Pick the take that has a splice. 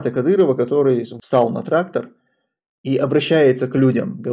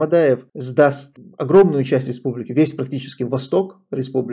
first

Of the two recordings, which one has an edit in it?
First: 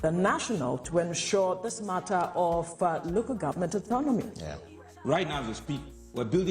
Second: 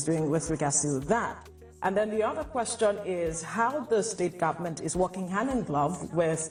first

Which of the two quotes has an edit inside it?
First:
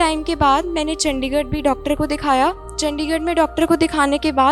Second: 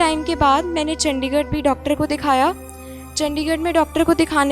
first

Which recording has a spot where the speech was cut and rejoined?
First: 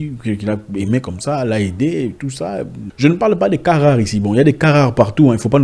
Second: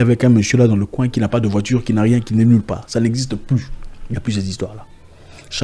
first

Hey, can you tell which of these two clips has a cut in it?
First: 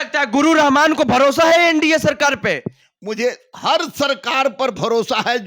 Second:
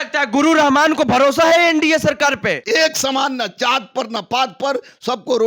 second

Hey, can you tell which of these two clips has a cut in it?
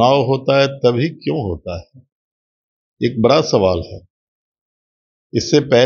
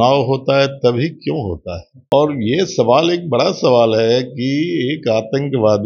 second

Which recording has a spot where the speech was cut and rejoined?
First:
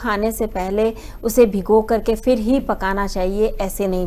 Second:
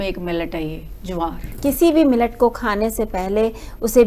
second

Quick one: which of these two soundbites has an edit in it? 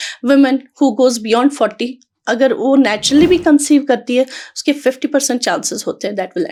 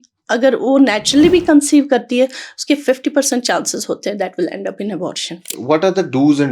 second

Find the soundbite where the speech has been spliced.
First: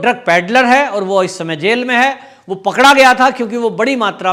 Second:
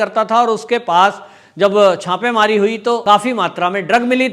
second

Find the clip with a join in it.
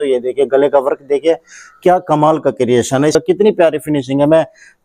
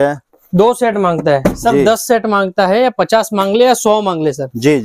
first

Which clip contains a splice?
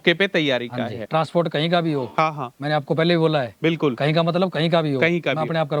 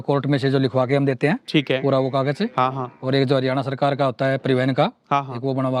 first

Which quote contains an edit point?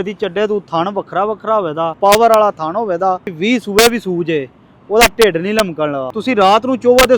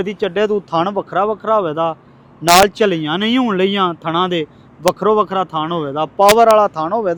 first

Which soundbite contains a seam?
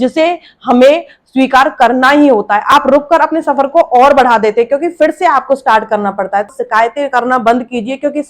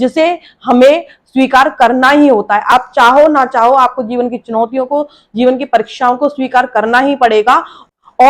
first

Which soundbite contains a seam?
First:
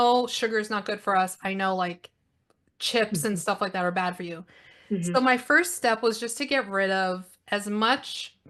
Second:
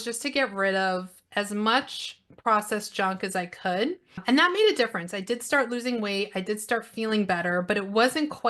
second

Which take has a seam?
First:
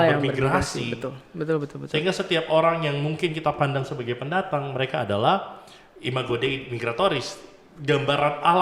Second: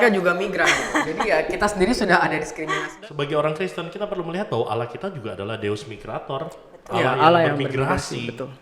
second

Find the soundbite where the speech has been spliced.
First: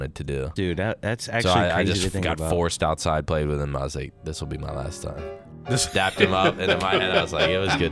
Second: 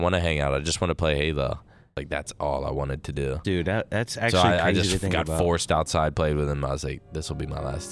second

